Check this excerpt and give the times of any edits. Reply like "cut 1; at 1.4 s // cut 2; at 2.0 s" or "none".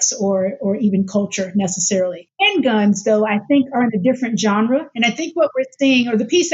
cut 1; at 2.2 s